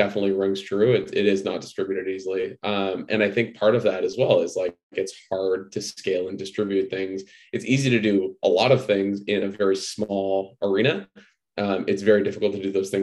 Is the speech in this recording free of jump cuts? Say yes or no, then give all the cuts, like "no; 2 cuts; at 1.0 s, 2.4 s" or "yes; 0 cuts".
yes; 0 cuts